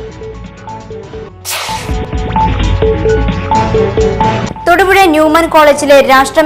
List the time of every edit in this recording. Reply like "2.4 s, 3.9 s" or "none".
1.3 s